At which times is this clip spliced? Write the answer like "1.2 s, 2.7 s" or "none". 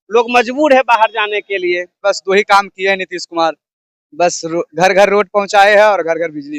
2.0 s